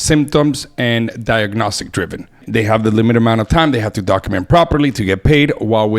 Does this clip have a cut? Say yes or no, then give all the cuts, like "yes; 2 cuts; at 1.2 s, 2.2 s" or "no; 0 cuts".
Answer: yes; 1 cut; at 2.4 s